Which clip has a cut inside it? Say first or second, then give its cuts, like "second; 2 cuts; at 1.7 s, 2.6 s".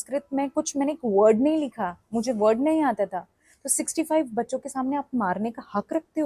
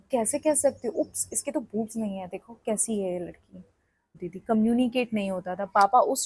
second; 1 cut; at 4.2 s